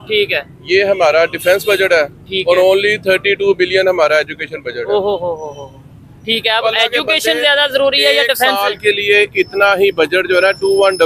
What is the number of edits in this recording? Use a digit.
0